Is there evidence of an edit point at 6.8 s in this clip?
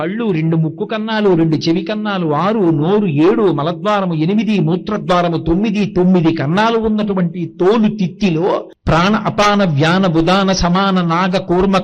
no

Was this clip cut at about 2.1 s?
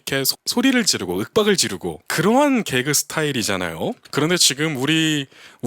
yes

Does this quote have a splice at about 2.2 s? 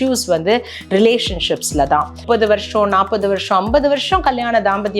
yes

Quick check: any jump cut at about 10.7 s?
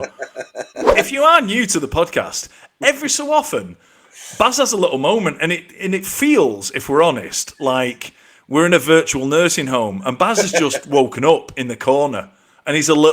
no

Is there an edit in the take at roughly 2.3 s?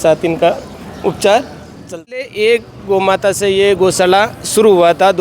yes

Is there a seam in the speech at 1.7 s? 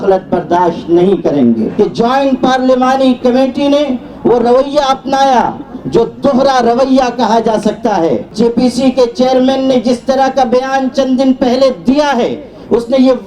yes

